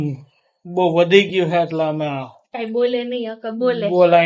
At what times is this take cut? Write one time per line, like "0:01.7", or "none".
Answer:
none